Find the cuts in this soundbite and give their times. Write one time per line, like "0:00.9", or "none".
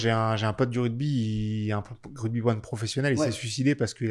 none